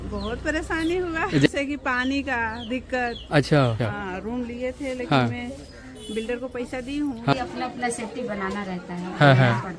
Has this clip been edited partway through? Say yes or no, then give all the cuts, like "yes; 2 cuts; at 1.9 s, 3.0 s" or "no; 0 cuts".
yes; 3 cuts; at 1.5 s, 3.8 s, 7.3 s